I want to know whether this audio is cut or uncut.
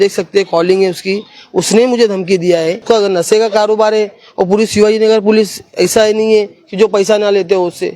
cut